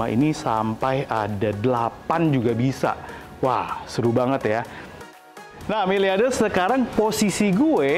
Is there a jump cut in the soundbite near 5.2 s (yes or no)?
yes